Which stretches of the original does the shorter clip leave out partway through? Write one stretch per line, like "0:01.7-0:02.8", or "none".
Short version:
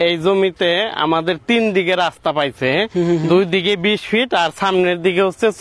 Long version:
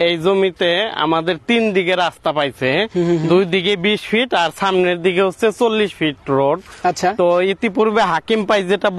none

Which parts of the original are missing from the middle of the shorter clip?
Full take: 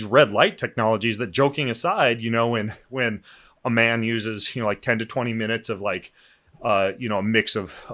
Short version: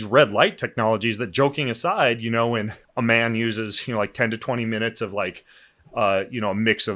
0:02.8-0:03.5

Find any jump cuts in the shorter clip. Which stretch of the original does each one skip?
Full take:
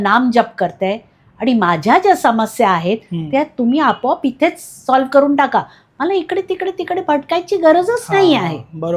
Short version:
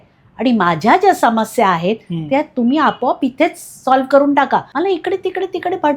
0:05.7-0:05.9

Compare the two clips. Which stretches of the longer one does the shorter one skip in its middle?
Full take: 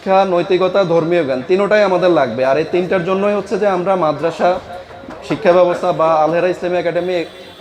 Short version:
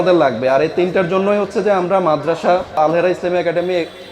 0:04.7-0:06.2

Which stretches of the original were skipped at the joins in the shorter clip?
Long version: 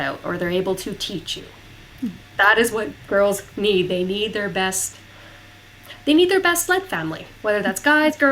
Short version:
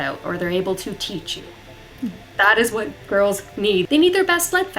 0:03.9-0:06.0

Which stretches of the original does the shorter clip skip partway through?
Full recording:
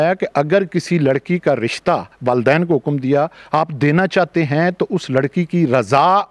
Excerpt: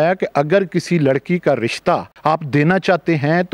0:02.1-0:03.4

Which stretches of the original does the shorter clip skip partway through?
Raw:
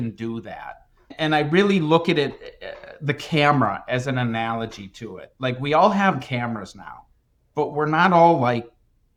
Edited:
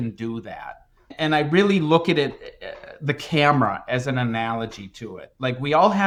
none

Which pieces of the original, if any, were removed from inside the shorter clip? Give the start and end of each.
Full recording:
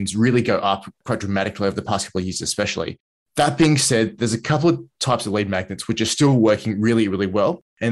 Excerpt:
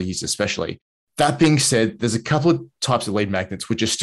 none

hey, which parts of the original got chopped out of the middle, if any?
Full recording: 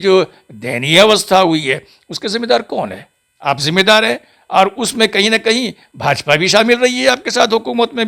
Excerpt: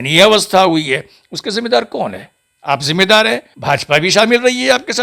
0:04.3-0:05.9

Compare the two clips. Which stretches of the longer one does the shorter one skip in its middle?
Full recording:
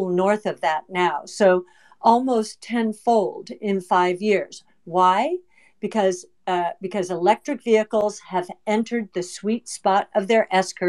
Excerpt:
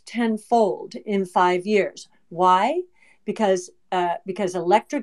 none

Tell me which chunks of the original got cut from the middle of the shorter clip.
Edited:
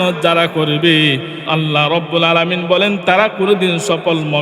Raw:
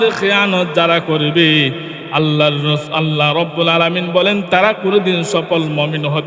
0:01.9-0:02.9

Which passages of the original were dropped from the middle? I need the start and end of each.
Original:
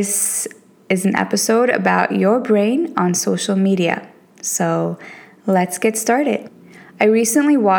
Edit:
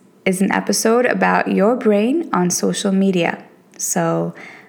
none

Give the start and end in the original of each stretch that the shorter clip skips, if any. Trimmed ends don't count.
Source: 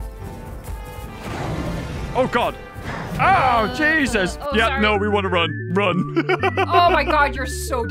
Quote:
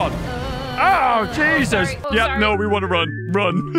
none

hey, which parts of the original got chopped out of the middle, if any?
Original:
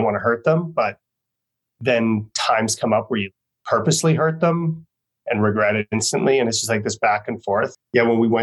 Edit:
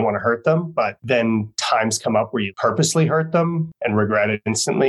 0:01.0-0:01.7
0:03.3-0:03.6
0:04.8-0:05.2

